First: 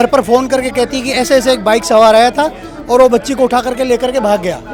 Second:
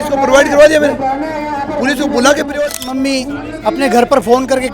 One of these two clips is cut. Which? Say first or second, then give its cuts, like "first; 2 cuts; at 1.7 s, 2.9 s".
second; 1 cut; at 2.5 s